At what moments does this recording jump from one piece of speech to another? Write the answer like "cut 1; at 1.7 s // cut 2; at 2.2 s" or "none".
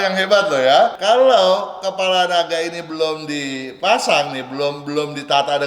cut 1; at 1.0 s